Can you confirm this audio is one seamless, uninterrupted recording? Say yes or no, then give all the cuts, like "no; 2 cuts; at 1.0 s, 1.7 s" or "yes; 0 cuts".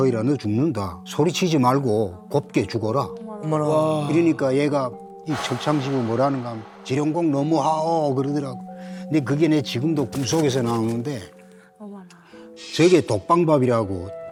yes; 0 cuts